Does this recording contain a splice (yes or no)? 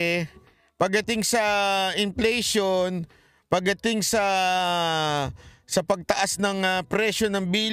no